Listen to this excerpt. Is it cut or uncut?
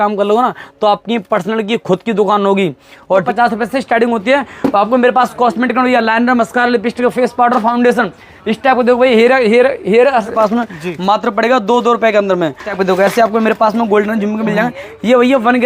cut